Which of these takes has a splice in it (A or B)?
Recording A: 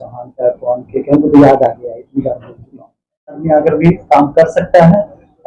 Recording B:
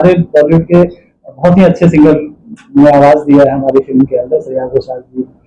A